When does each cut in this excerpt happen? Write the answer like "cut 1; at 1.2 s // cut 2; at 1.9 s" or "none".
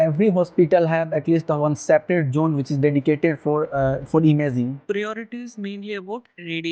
cut 1; at 4.8 s